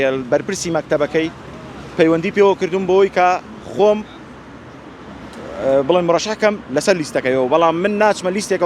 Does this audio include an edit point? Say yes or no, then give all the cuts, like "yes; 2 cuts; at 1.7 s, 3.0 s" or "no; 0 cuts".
no; 0 cuts